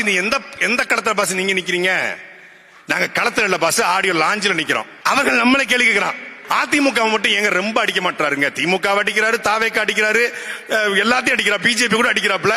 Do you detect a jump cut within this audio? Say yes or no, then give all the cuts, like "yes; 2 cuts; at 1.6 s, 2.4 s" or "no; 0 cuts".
yes; 2 cuts; at 4.9 s, 6.3 s